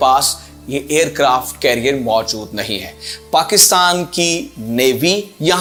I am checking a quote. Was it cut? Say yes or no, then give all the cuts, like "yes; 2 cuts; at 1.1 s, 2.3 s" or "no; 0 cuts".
no; 0 cuts